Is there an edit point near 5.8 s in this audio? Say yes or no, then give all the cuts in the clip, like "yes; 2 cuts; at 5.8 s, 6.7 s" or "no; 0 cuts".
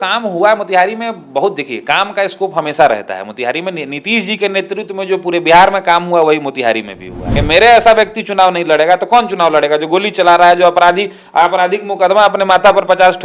no; 1 cut; at 7.3 s